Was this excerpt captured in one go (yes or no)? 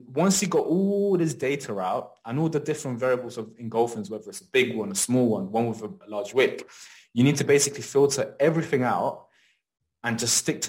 yes